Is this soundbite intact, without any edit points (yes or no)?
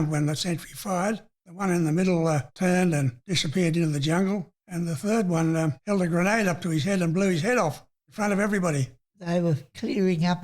no